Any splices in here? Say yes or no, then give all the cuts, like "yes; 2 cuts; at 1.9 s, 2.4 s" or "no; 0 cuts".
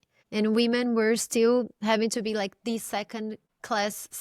no; 0 cuts